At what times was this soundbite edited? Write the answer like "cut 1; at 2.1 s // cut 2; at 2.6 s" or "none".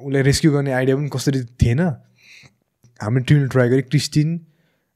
cut 1; at 2.9 s